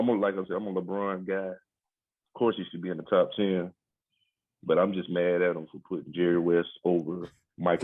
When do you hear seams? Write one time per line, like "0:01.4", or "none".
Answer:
none